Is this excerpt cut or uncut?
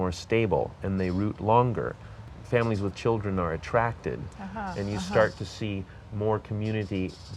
cut